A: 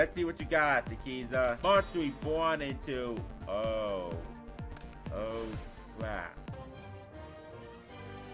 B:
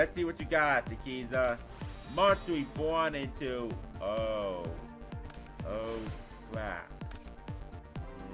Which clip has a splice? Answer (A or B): A